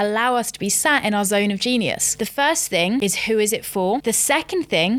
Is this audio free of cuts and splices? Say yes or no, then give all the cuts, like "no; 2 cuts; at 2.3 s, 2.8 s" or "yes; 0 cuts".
no; 3 cuts; at 2.2 s, 3.0 s, 4.0 s